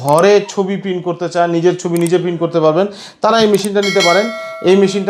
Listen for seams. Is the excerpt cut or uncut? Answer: uncut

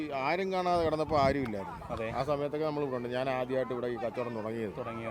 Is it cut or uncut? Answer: uncut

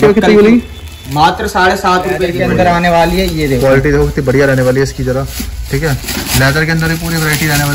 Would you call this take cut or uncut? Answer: cut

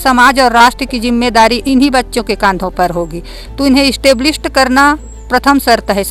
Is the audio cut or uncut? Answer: uncut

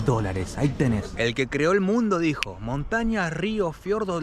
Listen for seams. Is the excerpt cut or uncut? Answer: cut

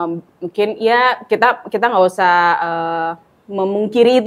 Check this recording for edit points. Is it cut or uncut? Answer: uncut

